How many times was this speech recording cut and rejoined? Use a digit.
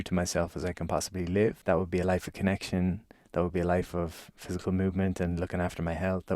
1